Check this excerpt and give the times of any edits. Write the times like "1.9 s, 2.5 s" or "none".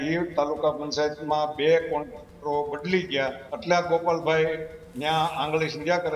3.5 s